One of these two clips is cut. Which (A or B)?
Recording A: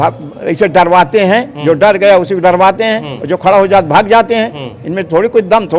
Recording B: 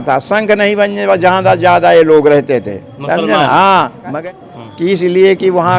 B